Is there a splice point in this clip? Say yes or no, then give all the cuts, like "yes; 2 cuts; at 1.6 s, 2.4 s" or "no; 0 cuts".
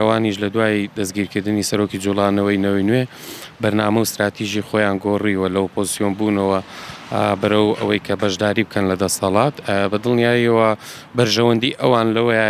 no; 0 cuts